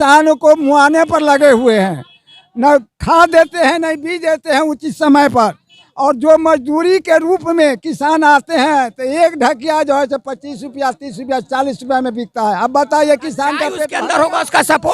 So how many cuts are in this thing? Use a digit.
1